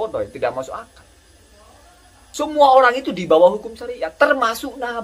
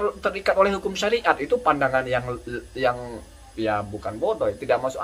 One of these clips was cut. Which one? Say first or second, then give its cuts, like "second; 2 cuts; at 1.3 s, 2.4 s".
first; 1 cut; at 2.2 s